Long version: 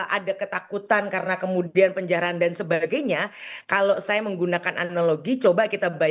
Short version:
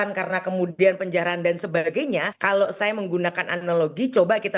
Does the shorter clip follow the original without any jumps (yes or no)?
no